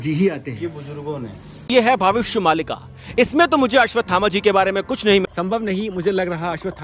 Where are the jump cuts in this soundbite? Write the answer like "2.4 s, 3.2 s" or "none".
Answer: 1.7 s, 5.2 s

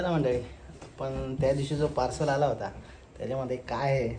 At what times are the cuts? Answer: none

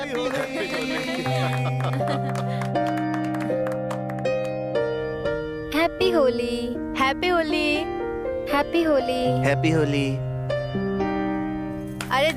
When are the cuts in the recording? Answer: none

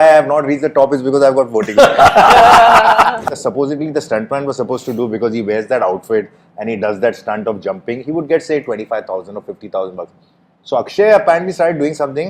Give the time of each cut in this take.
3.2 s

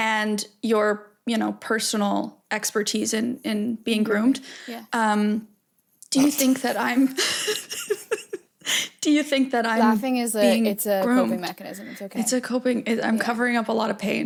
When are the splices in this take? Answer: none

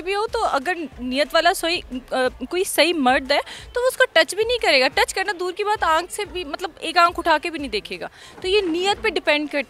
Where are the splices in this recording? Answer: none

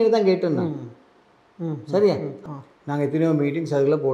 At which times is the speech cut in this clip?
2.3 s

